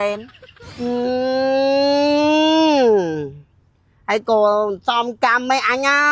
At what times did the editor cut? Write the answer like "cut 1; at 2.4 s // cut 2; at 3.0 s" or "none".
none